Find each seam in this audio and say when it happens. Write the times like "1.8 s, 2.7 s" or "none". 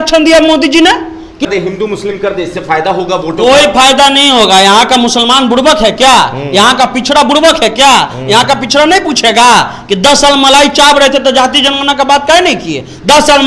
1.4 s